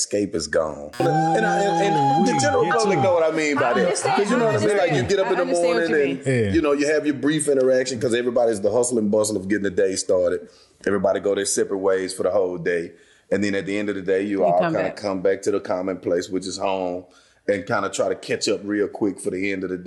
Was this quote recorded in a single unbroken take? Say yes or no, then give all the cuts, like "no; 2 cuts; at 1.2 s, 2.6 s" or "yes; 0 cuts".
no; 1 cut; at 1.0 s